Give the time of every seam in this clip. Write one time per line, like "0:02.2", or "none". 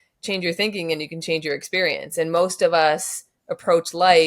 none